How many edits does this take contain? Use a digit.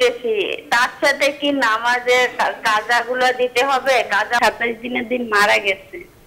1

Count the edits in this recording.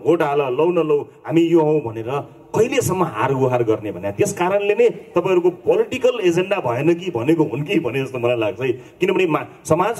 0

